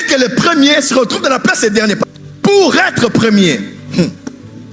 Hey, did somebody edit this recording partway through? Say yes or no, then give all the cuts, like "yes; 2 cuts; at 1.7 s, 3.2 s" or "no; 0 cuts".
yes; 1 cut; at 2.1 s